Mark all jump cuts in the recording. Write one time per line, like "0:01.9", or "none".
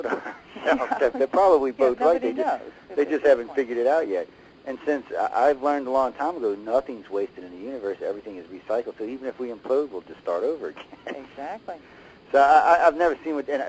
0:05.2

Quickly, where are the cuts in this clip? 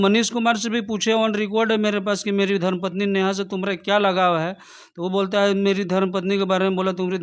none

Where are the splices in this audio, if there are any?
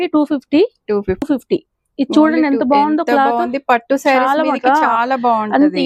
0:01.2

